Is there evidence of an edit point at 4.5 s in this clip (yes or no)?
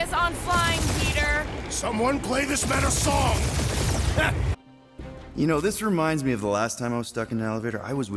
yes